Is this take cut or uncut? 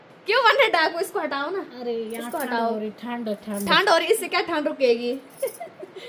uncut